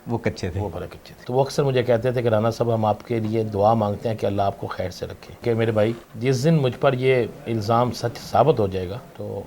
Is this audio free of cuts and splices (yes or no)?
no